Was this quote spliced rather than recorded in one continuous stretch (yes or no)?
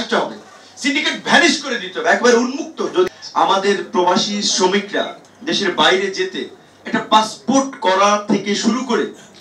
yes